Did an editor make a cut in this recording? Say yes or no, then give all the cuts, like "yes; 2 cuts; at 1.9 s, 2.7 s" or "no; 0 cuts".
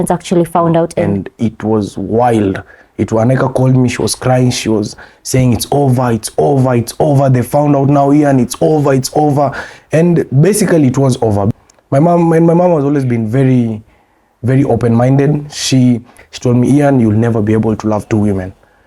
yes; 3 cuts; at 1.0 s, 11.5 s, 16.2 s